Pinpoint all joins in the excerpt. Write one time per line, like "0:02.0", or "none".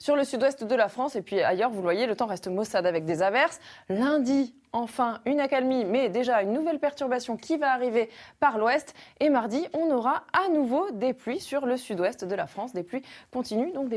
0:06.1